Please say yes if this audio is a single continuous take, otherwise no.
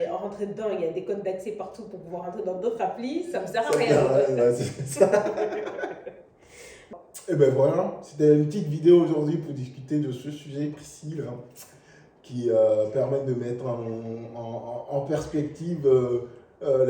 yes